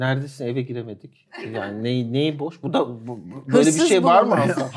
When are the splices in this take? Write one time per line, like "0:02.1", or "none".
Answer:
none